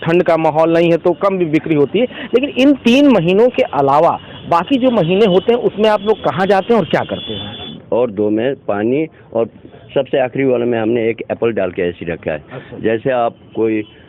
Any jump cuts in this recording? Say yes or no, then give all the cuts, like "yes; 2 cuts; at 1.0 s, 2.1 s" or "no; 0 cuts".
yes; 1 cut; at 7.8 s